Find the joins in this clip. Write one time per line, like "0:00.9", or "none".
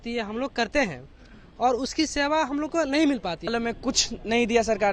0:03.5